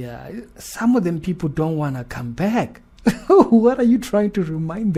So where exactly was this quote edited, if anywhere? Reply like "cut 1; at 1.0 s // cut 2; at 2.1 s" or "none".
none